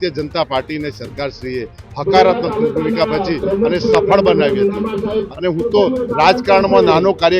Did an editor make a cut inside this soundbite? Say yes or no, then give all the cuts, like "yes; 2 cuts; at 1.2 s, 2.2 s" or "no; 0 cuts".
yes; 1 cut; at 5.3 s